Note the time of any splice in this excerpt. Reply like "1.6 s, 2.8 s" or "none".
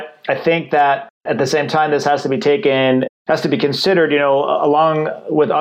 1.2 s, 3.1 s